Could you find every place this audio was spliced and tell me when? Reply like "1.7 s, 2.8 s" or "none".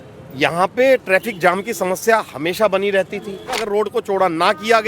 3.5 s